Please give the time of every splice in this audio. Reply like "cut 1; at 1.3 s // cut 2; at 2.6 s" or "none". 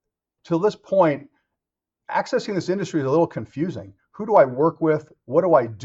none